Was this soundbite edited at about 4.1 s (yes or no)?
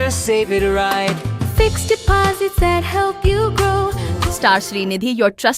yes